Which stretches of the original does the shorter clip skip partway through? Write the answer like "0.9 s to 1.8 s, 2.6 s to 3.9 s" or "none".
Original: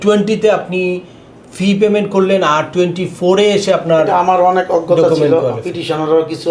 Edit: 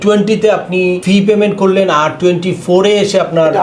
1.0 s to 1.5 s